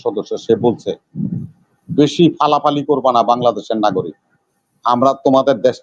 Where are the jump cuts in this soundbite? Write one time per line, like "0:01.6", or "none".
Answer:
none